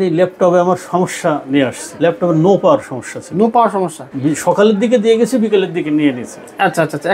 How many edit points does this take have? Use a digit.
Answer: 2